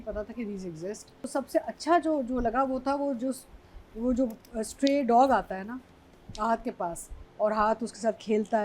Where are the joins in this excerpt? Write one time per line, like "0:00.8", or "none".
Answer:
0:01.2